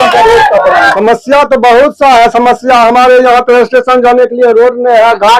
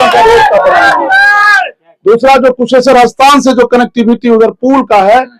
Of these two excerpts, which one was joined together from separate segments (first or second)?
first